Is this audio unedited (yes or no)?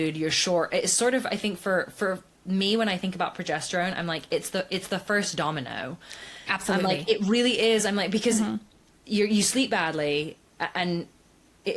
yes